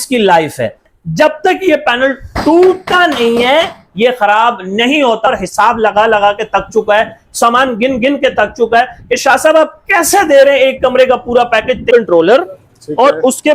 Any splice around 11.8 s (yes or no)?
yes